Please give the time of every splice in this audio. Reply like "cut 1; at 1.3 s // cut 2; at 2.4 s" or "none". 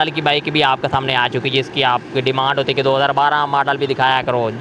none